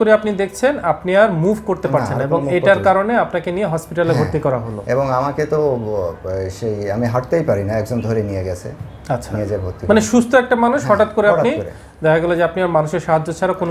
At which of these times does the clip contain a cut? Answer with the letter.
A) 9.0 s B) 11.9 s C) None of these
C